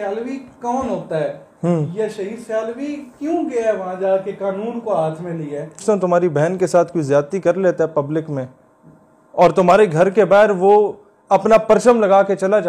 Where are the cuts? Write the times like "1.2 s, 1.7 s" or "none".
5.8 s